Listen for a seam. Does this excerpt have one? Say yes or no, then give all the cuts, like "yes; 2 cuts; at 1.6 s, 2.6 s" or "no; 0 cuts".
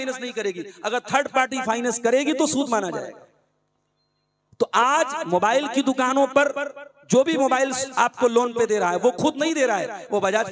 no; 0 cuts